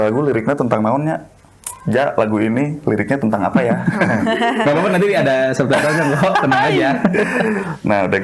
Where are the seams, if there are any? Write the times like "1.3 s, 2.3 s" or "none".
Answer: none